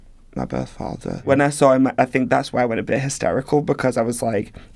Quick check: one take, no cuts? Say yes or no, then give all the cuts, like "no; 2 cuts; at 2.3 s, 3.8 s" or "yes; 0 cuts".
no; 1 cut; at 1.3 s